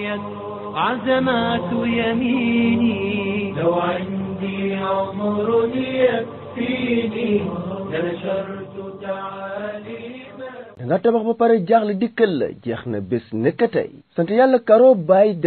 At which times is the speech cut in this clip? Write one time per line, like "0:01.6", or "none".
0:10.8